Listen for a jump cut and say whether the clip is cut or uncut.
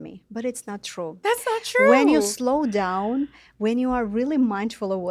uncut